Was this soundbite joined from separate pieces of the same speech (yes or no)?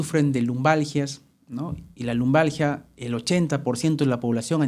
no